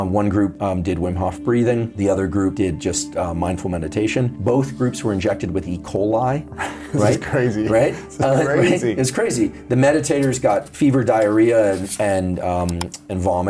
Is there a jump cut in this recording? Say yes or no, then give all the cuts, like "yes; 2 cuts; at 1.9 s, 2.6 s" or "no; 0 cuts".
no; 0 cuts